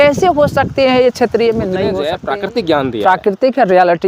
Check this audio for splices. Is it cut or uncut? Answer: cut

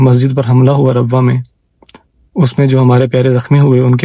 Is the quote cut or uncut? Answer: uncut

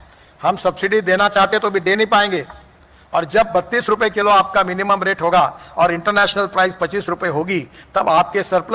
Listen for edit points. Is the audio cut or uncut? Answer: uncut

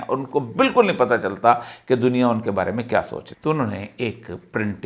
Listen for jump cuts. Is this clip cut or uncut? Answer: cut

